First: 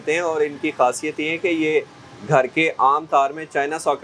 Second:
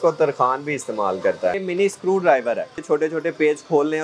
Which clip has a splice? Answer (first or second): second